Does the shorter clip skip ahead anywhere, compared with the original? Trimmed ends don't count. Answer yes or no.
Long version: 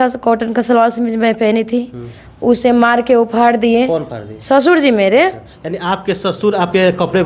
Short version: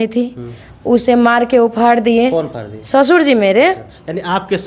no